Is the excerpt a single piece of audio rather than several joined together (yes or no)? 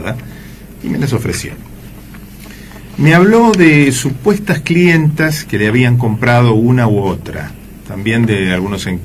no